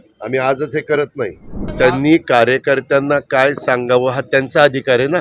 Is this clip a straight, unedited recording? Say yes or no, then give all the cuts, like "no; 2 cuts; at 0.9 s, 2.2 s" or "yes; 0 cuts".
no; 1 cut; at 1.6 s